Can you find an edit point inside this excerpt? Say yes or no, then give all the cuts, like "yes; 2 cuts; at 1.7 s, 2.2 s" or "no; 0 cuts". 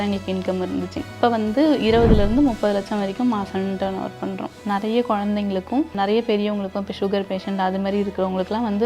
yes; 3 cuts; at 1.1 s, 4.6 s, 5.9 s